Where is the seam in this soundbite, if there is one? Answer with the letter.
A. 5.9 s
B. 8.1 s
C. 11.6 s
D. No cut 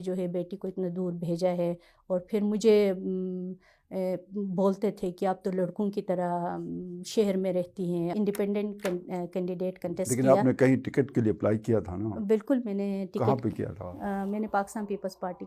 B